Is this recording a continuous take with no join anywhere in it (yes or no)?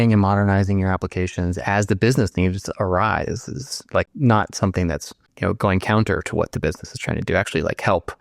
no